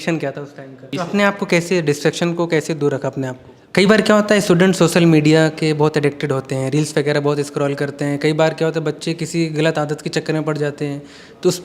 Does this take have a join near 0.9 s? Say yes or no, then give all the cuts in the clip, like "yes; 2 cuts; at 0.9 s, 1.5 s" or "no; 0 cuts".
yes; 2 cuts; at 0.9 s, 3.5 s